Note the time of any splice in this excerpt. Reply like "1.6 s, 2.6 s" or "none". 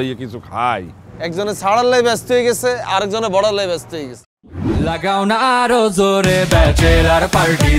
4.8 s